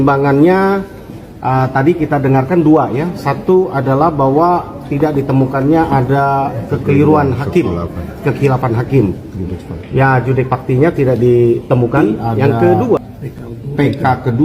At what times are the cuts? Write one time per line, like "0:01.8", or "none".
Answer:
0:13.0

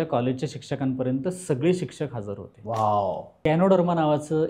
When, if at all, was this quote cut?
0:03.3

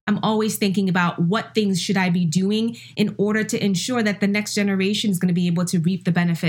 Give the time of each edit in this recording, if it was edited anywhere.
none

